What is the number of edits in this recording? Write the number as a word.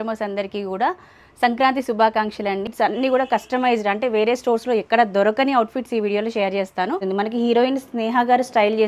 two